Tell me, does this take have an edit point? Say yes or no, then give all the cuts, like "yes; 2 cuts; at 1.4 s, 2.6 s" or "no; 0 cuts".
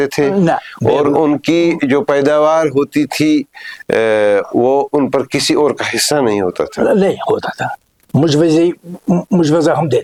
no; 0 cuts